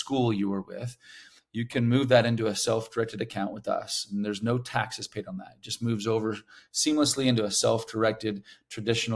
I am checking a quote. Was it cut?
no; 0 cuts

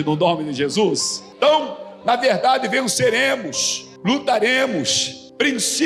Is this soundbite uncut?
yes; 0 cuts

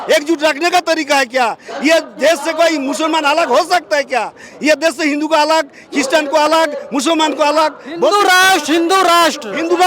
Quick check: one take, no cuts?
yes; 0 cuts

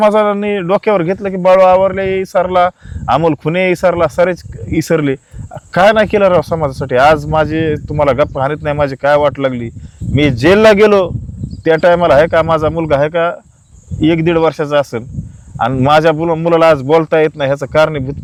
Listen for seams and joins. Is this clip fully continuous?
yes; 0 cuts

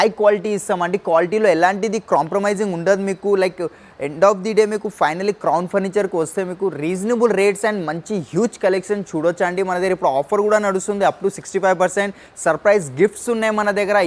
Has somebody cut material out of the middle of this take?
no; 0 cuts

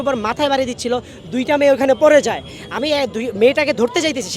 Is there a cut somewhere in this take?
no; 0 cuts

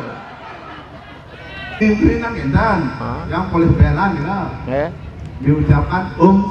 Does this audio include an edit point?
yes; 1 cut; at 1.8 s

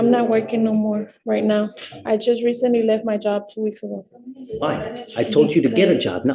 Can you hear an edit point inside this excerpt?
no; 0 cuts

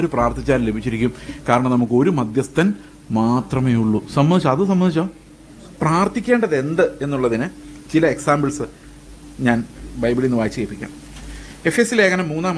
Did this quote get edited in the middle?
yes; 1 cut; at 5.7 s

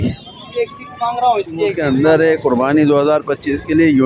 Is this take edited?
yes; 1 cut; at 1.8 s

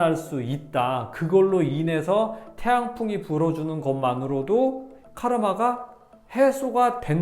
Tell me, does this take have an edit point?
yes; 1 cut; at 5.0 s

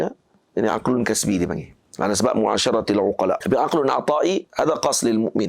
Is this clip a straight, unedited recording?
no; 1 cut; at 3.4 s

